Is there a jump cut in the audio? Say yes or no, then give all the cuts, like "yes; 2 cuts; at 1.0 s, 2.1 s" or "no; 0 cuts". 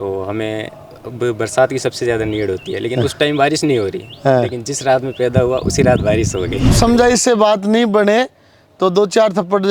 yes; 1 cut; at 6.7 s